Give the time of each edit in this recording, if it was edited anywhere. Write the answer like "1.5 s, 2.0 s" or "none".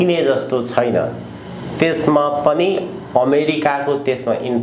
none